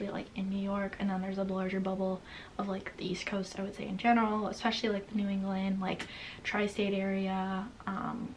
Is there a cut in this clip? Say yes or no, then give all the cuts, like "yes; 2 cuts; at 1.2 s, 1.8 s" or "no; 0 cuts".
no; 0 cuts